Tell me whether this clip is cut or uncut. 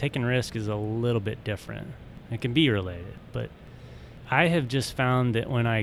cut